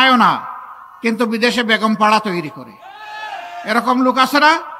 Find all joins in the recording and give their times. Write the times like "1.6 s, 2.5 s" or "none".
none

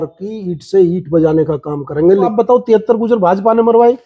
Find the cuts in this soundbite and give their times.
2.3 s

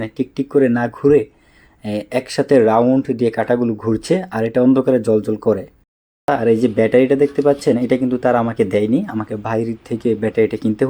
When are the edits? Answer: 6.3 s

